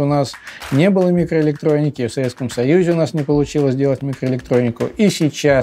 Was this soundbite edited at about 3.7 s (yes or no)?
no